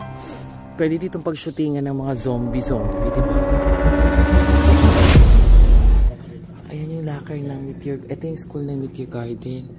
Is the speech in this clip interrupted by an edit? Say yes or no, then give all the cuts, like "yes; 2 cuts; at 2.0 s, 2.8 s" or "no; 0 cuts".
yes; 1 cut; at 6.1 s